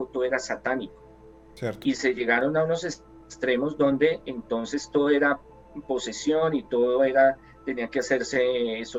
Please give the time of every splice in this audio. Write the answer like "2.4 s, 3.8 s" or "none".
none